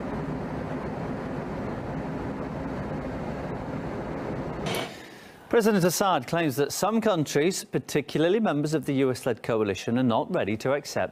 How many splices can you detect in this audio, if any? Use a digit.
1